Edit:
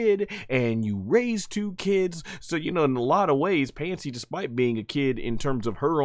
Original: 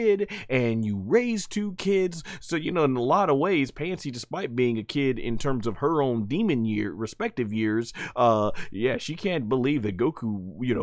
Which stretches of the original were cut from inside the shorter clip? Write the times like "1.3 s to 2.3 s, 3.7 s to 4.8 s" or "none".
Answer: none